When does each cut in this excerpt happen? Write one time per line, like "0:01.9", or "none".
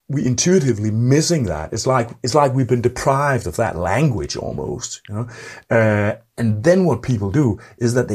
none